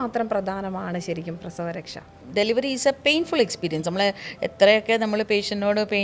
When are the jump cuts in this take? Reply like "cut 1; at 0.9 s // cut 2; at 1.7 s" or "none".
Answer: cut 1; at 2.2 s